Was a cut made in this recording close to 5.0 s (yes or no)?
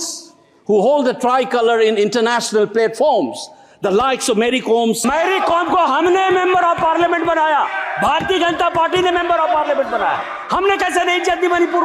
yes